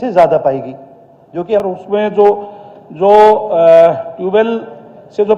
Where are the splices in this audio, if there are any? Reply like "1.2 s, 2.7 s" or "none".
1.6 s